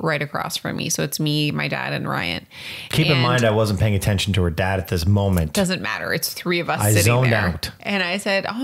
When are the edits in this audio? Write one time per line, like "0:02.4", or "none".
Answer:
none